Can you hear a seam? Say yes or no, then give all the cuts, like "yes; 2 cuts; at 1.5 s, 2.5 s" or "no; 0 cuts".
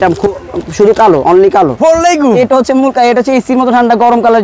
yes; 1 cut; at 1.7 s